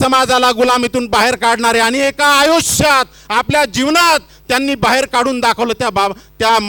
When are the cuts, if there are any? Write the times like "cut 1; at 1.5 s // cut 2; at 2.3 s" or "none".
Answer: none